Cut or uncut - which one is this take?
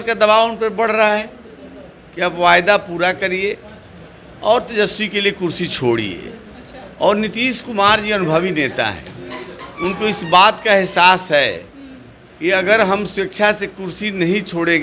uncut